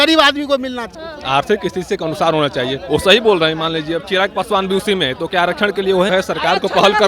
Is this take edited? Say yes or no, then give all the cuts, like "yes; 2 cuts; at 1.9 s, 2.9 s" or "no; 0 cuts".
yes; 2 cuts; at 0.9 s, 6.1 s